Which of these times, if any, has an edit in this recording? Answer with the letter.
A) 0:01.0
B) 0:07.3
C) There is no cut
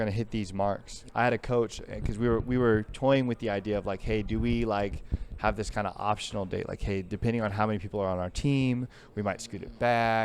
A